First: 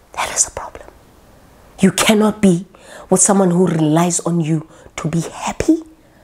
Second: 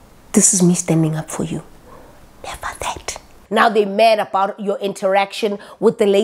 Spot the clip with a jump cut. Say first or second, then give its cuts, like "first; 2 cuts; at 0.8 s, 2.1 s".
second; 1 cut; at 3.4 s